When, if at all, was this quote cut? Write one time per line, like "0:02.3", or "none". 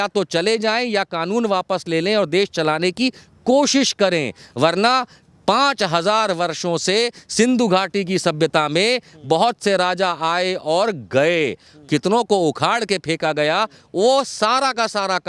none